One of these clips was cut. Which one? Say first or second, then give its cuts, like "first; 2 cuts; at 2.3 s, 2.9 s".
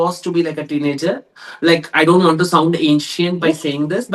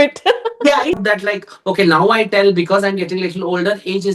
second; 1 cut; at 1.0 s